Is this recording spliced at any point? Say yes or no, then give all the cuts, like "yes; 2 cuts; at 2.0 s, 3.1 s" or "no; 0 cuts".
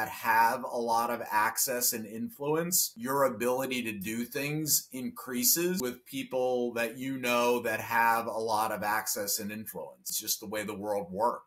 yes; 3 cuts; at 2.9 s, 5.8 s, 10.2 s